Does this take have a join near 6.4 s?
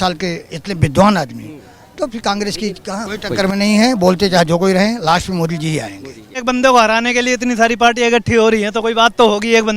yes; 2 cuts; at 3.1 s, 6.4 s

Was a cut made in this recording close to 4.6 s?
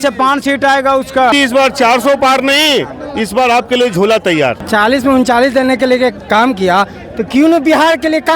yes; 2 cuts; at 1.3 s, 4.6 s

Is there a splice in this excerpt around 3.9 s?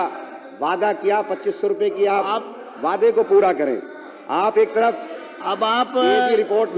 no; 0 cuts

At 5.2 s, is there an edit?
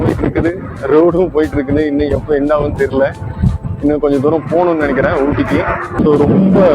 no; 0 cuts

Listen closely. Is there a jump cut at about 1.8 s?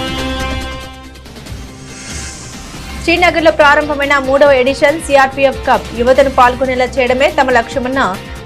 no; 1 cut; at 3.0 s

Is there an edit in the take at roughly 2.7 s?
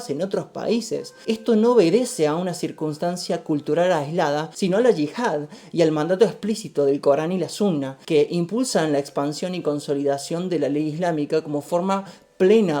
no; 3 cuts; at 1.1 s, 4.5 s, 7.9 s

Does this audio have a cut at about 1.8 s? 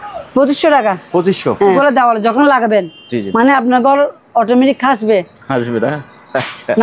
yes; 1 cut; at 1.8 s

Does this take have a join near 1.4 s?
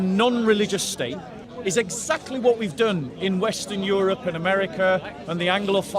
yes; 1 cut; at 1.4 s

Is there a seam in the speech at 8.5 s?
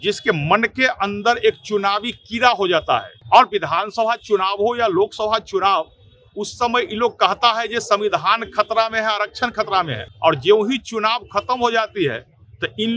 no; 2 cuts; at 3.1 s, 10.0 s

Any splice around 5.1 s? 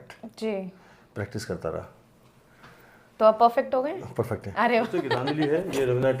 yes; 1 cut; at 5.1 s

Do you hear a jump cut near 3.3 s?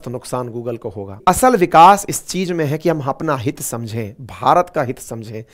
no; 1 cut; at 1.2 s

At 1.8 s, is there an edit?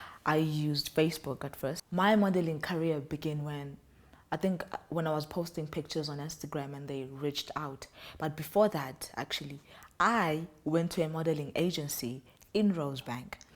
yes; 1 cut; at 1.8 s

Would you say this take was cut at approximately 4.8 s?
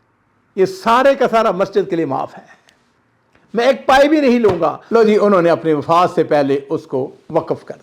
yes; 1 cut; at 4.8 s

